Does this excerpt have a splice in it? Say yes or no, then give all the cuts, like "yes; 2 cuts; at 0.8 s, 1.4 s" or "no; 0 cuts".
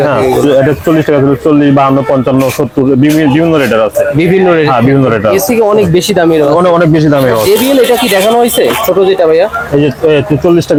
no; 0 cuts